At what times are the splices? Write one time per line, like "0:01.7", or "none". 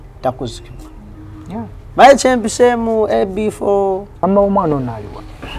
0:04.2